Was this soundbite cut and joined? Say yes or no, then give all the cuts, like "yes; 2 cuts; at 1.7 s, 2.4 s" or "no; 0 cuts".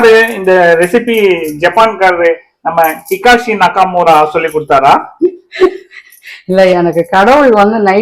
no; 0 cuts